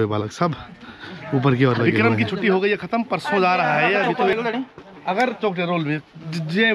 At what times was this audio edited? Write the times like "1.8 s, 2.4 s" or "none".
1.8 s, 4.3 s